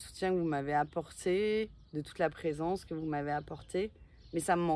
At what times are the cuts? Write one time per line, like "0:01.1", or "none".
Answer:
none